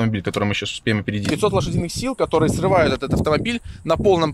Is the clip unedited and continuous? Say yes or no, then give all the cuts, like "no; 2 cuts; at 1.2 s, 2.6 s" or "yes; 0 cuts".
no; 1 cut; at 1.3 s